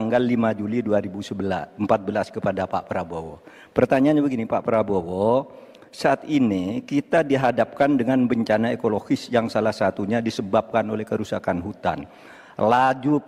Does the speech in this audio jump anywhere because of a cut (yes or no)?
no